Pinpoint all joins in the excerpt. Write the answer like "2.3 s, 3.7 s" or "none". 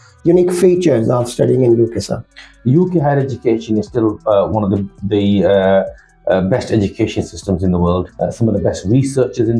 2.5 s, 8.1 s